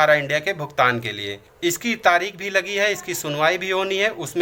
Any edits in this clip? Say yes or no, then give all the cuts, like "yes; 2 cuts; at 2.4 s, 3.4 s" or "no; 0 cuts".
yes; 1 cut; at 1.5 s